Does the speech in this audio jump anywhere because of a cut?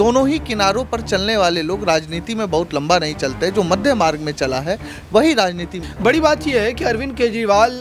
yes; 1 cut; at 5.8 s

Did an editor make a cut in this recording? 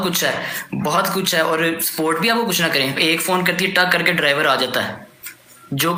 no; 0 cuts

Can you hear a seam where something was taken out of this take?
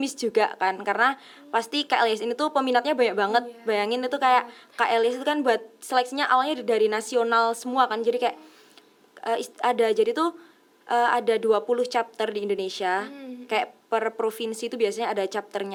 no; 0 cuts

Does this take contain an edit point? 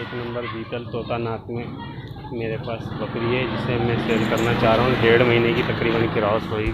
no; 0 cuts

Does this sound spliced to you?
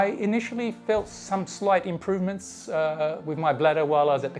no; 0 cuts

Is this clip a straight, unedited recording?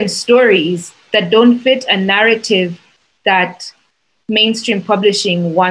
yes; 0 cuts

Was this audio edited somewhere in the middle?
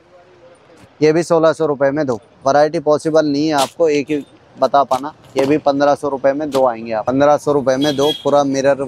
yes; 2 cuts; at 2.3 s, 7.0 s

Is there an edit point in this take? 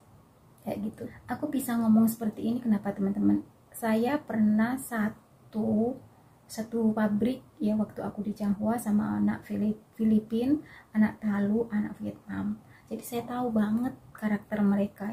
yes; 1 cut; at 1.2 s

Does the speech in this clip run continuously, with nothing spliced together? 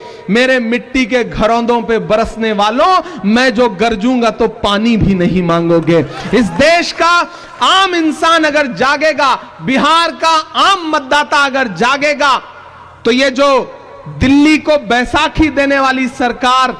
yes; 0 cuts

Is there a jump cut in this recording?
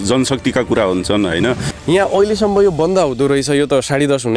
yes; 1 cut; at 1.7 s

